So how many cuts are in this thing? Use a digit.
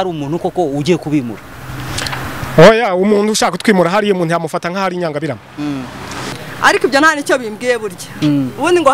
1